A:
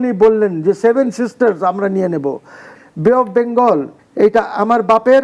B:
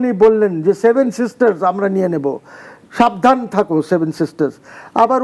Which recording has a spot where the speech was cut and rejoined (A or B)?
A